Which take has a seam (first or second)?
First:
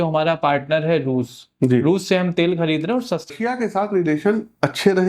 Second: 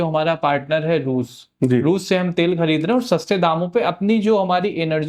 first